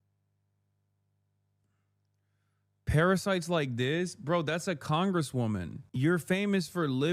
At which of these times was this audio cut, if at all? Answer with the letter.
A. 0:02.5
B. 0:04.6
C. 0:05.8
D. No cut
C